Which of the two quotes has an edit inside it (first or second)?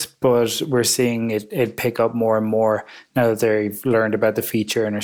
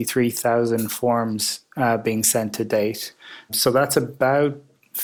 second